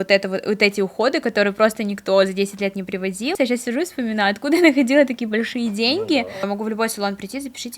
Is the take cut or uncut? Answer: cut